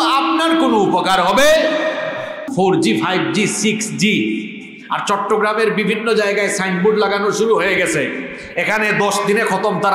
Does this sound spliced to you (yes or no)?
yes